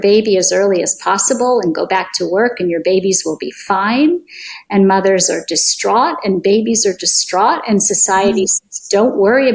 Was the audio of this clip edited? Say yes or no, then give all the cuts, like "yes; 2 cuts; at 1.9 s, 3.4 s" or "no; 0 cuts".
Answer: no; 0 cuts